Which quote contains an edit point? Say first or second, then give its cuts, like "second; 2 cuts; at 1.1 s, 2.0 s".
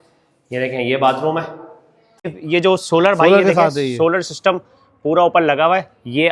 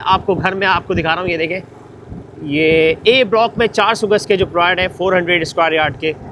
first; 1 cut; at 2.4 s